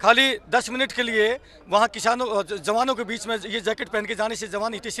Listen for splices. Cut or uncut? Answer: uncut